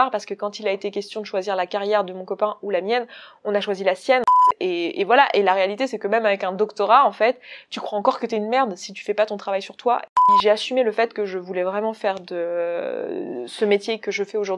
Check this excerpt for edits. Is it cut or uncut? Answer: cut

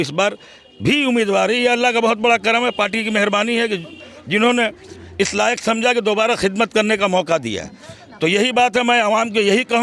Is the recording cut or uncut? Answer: uncut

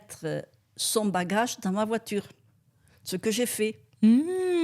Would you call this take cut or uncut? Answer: uncut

